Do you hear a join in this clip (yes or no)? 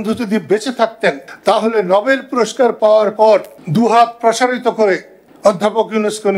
no